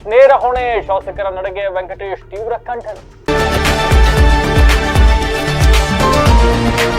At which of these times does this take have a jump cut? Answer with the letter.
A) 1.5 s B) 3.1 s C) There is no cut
B